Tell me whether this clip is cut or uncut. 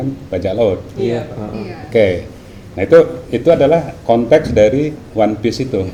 uncut